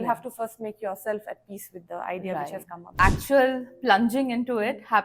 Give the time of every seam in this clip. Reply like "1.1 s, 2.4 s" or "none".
2.9 s